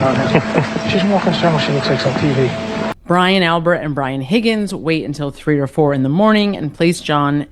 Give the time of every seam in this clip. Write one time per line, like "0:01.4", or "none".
0:02.9